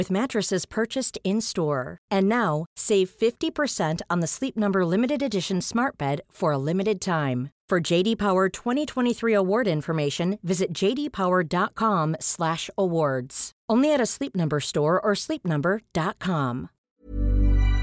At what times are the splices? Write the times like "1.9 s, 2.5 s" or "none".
16.9 s